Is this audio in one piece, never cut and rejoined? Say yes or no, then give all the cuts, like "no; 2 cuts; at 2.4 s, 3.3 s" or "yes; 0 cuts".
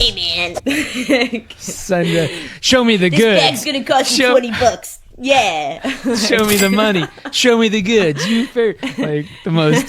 yes; 0 cuts